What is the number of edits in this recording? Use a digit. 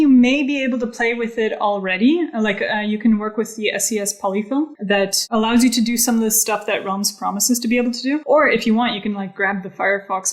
2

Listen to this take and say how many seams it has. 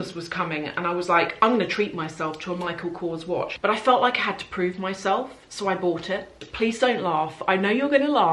2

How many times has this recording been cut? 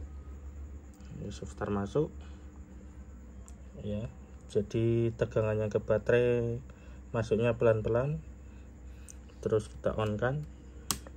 0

